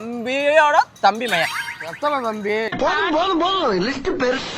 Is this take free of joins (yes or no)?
yes